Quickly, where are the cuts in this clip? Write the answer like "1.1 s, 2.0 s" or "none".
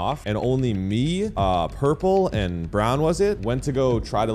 none